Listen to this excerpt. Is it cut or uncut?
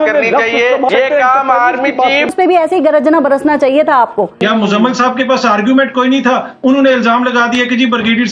cut